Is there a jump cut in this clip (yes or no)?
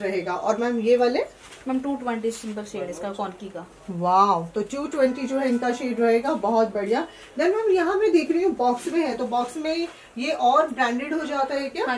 no